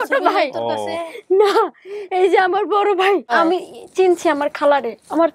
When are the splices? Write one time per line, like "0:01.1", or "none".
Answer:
0:03.3